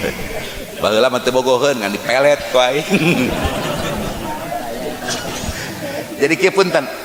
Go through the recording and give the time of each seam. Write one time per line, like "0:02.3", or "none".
none